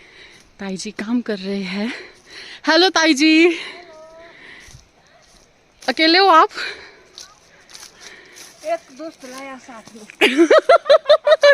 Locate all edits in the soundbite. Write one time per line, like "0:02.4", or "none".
0:10.6